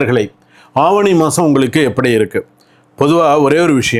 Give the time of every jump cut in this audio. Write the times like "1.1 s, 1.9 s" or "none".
none